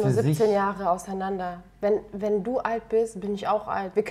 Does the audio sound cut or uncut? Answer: uncut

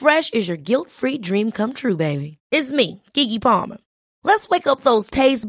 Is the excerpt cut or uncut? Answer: uncut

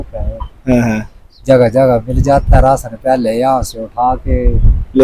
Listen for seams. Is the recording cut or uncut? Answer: uncut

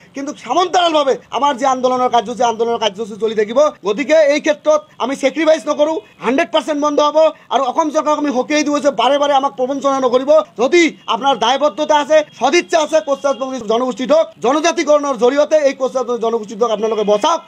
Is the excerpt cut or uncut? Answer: uncut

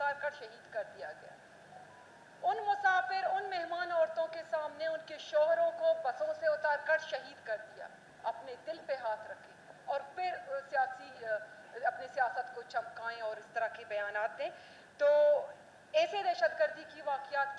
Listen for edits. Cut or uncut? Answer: uncut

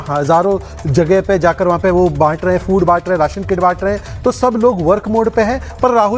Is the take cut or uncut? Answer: uncut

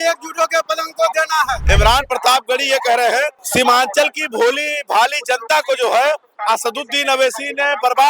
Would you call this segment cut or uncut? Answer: cut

